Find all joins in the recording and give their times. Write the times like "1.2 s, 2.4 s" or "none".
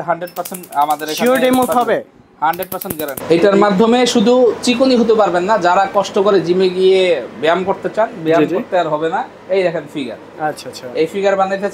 3.1 s